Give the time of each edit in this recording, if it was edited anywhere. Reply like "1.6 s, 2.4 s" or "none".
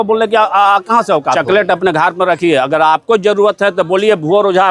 1.4 s